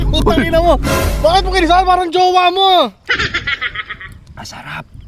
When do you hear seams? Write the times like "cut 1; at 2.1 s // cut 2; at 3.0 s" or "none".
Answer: none